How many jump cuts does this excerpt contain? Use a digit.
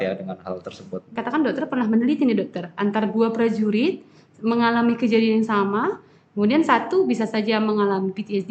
1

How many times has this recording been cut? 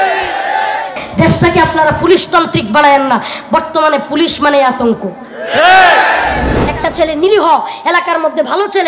2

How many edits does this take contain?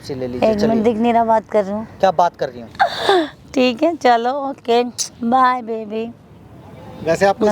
1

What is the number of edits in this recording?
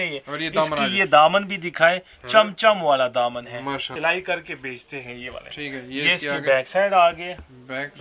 1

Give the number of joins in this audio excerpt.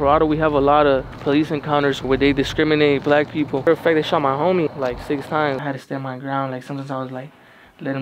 4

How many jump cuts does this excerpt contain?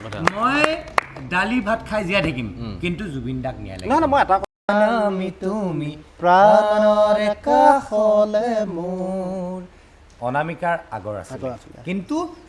1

